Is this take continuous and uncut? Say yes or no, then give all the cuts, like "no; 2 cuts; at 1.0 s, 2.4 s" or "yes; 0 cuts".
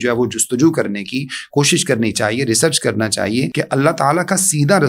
no; 1 cut; at 3.5 s